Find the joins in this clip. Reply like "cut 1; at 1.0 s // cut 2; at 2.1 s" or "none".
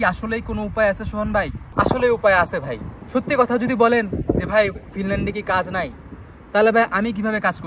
none